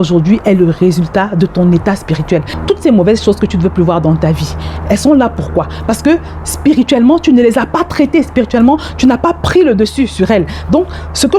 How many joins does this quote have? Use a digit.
1